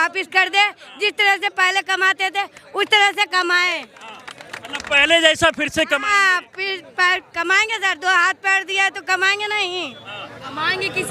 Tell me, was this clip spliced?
no; 0 cuts

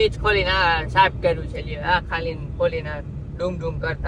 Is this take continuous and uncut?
yes; 0 cuts

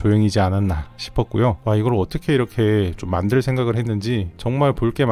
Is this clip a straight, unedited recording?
no; 1 cut; at 1.6 s

